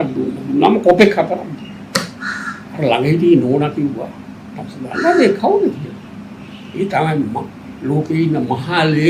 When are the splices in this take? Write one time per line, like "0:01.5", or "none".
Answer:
none

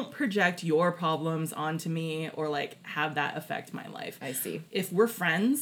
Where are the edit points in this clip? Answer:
0:04.6

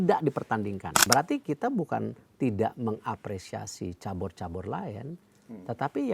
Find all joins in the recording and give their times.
0:01.0

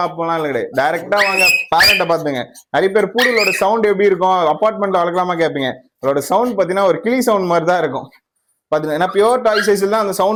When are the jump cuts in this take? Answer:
none

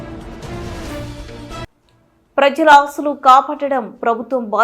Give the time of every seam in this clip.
0:01.6

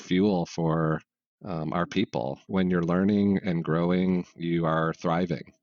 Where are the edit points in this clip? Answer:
none

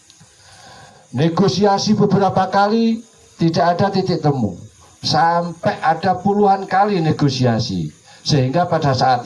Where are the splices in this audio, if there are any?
none

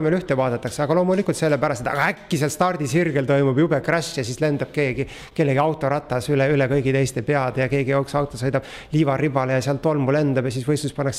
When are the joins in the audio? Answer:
none

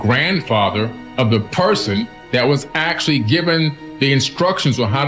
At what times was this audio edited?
0:01.0
0:02.2
0:03.8

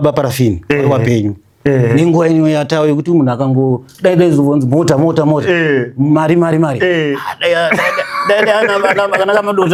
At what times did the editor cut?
none

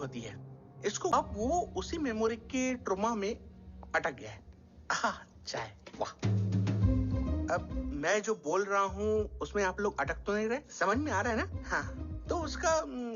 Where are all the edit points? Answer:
0:01.1

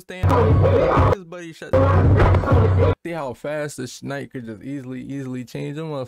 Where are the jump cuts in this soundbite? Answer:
0:03.0

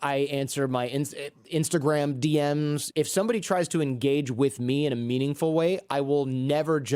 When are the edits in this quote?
0:02.8

